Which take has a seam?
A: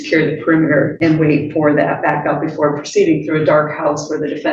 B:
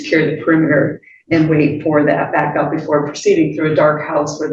A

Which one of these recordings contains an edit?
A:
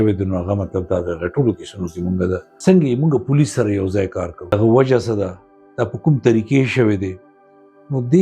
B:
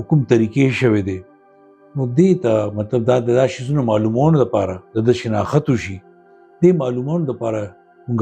A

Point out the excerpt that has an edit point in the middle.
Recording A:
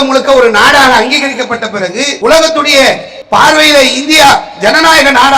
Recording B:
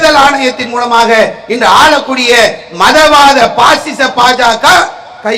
A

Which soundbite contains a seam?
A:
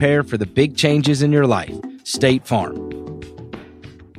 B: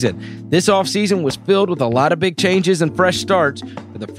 A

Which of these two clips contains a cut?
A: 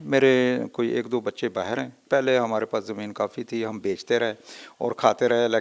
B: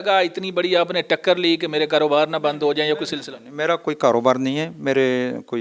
A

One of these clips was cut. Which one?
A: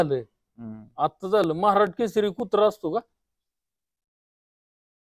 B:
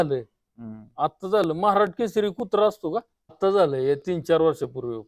B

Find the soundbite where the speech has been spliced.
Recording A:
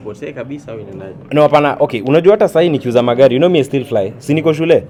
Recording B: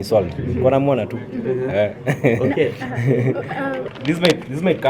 B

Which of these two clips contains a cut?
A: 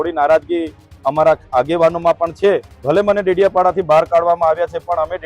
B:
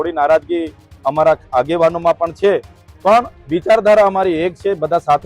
A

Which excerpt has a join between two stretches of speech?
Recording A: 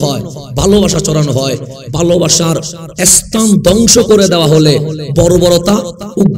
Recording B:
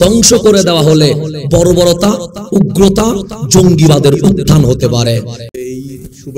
B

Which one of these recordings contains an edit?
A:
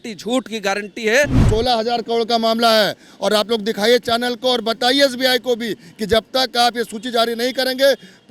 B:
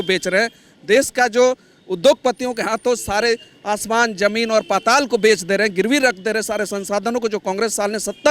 A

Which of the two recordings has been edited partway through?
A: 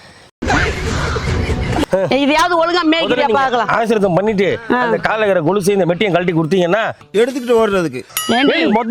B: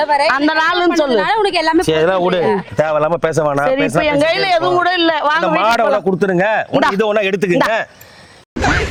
A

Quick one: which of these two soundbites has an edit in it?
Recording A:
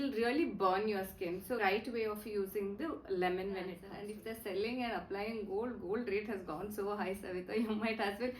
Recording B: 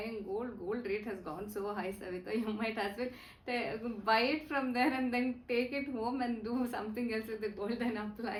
A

